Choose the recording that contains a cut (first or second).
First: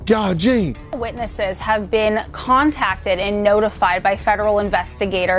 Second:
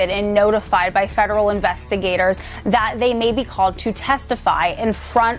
first